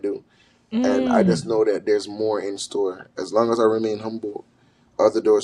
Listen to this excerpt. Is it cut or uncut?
uncut